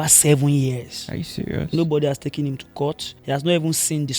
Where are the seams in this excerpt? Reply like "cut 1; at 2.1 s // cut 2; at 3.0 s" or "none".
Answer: cut 1; at 3.1 s